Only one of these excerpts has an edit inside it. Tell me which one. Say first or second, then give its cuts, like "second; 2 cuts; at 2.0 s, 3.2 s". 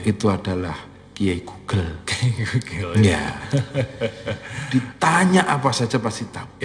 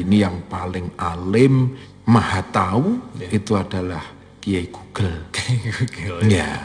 second; 1 cut; at 1.8 s